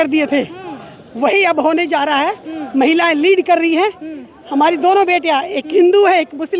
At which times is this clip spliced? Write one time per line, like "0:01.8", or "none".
none